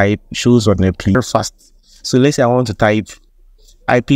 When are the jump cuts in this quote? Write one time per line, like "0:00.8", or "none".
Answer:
0:01.2